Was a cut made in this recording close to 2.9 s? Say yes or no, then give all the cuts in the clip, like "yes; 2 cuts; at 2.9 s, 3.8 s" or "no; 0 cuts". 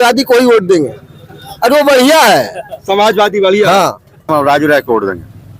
no; 1 cut; at 4.3 s